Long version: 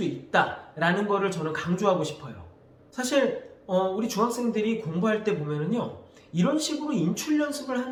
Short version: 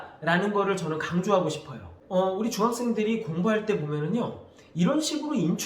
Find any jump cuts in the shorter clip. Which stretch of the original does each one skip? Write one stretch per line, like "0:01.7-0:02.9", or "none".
0:02.5-0:03.5